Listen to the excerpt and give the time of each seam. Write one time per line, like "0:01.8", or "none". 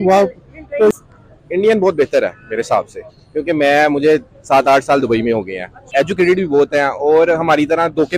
0:00.9
0:05.8